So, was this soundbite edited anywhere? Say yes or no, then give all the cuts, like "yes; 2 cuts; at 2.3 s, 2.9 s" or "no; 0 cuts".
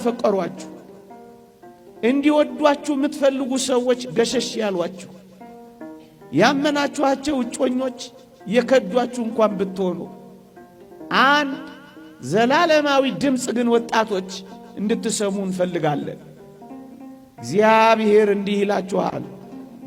no; 0 cuts